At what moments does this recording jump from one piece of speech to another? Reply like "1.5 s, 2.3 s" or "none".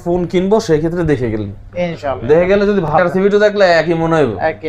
2.9 s